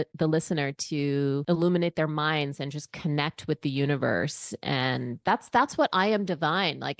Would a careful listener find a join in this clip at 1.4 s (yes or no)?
yes